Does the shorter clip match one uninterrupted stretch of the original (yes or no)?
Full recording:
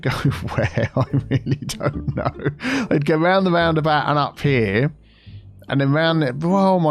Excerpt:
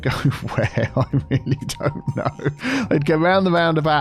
yes